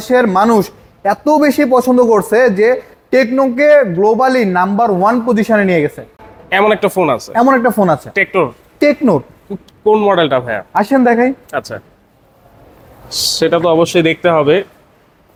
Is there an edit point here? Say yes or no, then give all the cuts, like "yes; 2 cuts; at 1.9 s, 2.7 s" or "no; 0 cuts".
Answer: no; 0 cuts